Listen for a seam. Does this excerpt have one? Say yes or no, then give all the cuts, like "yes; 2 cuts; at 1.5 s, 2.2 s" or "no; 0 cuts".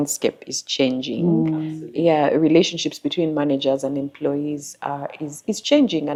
no; 0 cuts